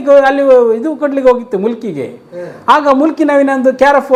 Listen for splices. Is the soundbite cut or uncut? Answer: uncut